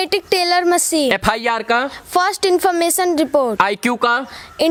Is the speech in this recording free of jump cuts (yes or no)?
yes